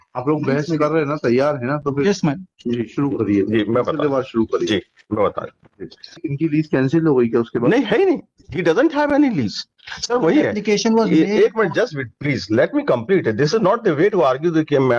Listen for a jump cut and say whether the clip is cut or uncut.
cut